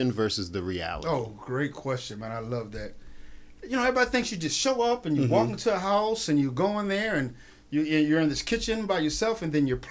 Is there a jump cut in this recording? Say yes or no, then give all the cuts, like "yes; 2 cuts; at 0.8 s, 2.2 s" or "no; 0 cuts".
no; 0 cuts